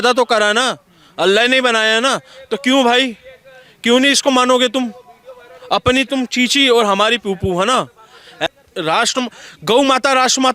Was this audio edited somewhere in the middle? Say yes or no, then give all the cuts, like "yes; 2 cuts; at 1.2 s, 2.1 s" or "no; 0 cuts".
yes; 1 cut; at 8.5 s